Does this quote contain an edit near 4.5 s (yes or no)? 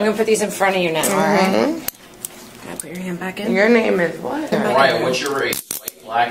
yes